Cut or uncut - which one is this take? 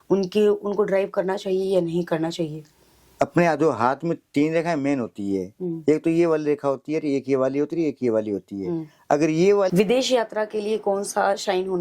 cut